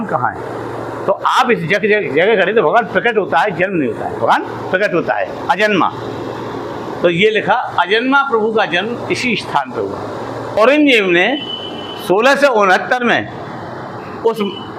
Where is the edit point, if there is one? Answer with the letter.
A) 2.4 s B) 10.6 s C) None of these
B